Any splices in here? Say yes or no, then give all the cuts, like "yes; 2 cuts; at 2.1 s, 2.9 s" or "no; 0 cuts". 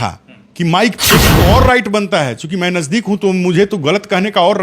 yes; 1 cut; at 1.3 s